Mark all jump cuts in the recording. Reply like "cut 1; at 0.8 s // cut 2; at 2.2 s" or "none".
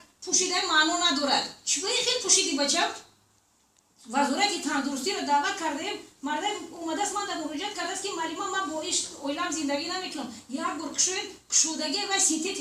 none